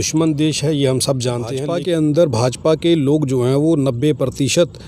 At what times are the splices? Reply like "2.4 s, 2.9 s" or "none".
1.6 s